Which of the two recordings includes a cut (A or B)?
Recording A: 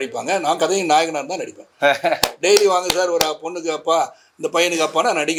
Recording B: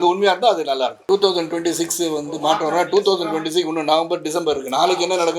B